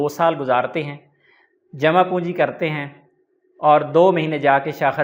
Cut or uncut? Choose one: uncut